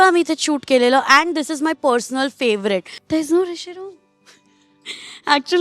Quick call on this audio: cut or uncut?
cut